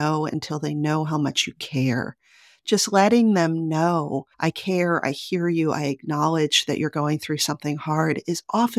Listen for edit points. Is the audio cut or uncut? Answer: uncut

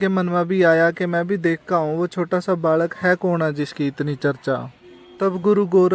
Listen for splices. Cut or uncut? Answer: uncut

